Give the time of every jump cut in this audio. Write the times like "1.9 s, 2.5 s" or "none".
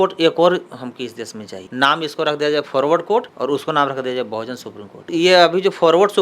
1.6 s, 5.1 s

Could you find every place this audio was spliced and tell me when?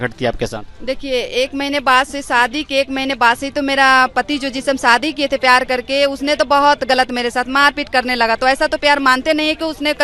none

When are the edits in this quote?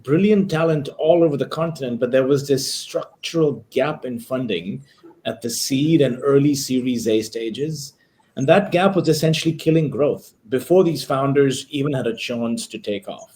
none

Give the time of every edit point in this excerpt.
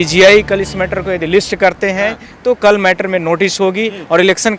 none

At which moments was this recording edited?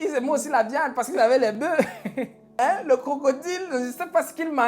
2.5 s

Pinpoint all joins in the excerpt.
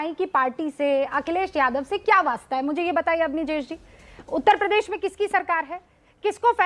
none

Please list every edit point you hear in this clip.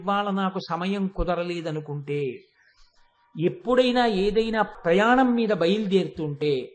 4.7 s

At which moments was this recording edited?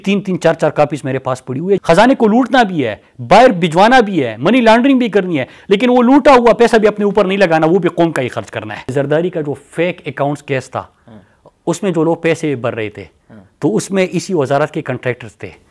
1.8 s, 8.9 s

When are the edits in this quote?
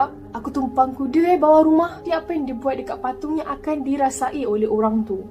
2.0 s

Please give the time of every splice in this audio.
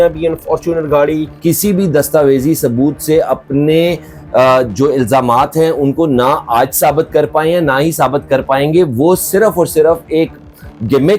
1.3 s

